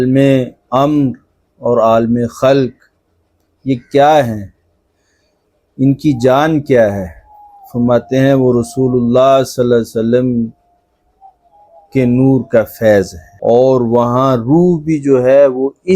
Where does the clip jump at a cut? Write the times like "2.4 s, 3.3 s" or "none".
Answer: 13.2 s

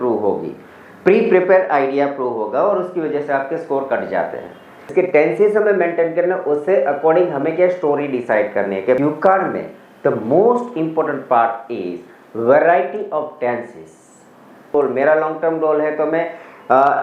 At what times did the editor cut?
4.9 s, 9.0 s, 14.4 s

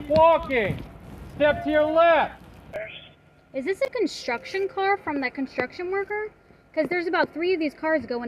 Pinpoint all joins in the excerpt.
2.8 s, 3.9 s

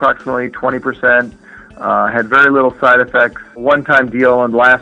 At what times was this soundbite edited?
3.6 s

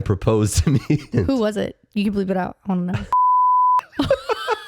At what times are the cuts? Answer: 1.1 s

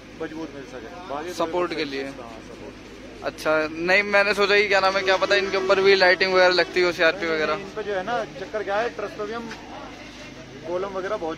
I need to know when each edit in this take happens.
none

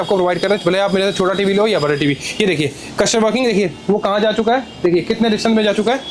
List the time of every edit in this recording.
none

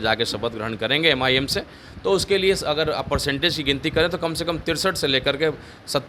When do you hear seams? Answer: none

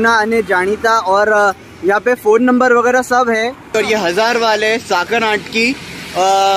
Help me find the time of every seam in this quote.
3.8 s

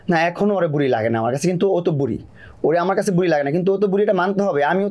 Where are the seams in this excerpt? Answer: none

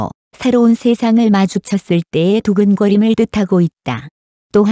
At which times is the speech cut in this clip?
3.8 s

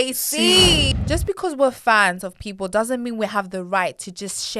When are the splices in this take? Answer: 0.9 s

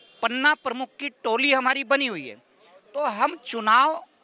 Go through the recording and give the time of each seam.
none

